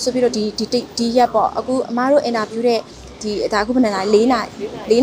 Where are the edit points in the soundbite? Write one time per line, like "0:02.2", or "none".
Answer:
none